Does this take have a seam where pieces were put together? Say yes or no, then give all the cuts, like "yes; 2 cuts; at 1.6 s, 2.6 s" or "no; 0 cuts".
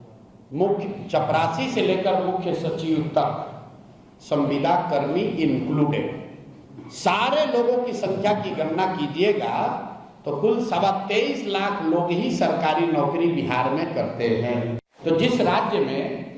yes; 1 cut; at 14.8 s